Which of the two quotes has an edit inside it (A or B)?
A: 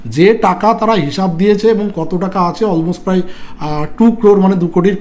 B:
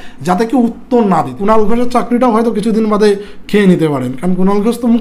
B